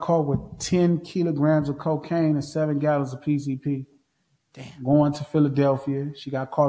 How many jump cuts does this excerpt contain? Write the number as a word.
zero